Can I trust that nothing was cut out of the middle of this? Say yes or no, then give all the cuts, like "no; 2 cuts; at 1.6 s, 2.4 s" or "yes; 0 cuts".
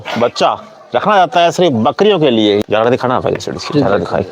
no; 1 cut; at 2.6 s